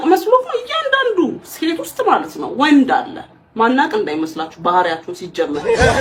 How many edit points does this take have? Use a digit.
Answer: 0